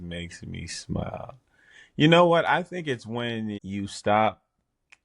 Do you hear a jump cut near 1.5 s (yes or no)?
no